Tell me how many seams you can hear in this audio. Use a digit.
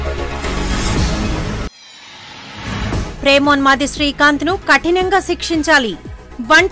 2